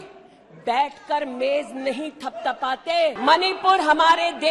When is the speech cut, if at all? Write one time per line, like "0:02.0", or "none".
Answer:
0:03.2